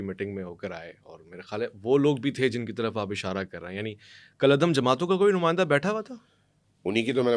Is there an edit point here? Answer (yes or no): no